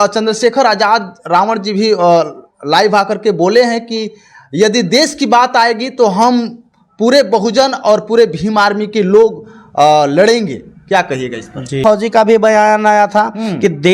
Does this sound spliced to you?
yes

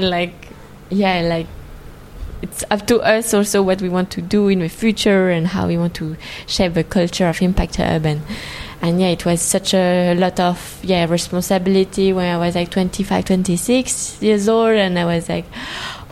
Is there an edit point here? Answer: no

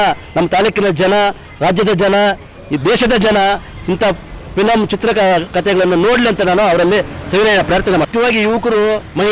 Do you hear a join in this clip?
yes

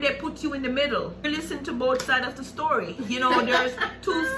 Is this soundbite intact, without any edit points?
no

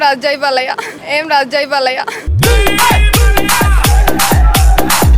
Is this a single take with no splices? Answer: yes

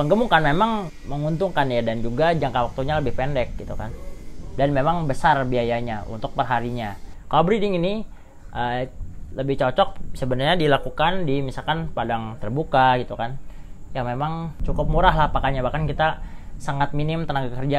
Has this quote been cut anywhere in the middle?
yes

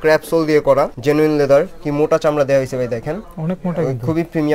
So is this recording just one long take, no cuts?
no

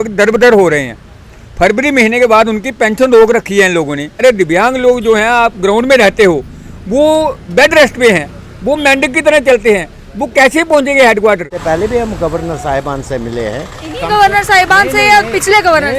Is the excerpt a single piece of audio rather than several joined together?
no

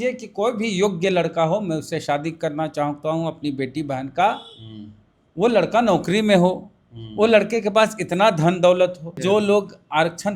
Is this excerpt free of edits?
no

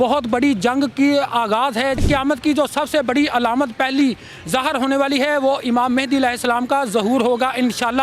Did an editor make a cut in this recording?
yes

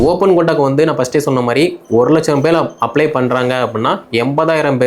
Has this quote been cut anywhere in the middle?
no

